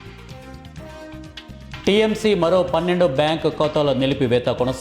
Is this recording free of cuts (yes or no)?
no